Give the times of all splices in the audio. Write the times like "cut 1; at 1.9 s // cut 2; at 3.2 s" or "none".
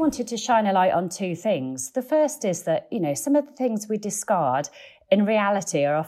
none